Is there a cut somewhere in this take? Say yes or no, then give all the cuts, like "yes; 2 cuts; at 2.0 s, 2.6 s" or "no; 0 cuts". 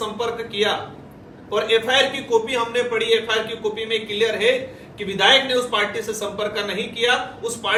no; 0 cuts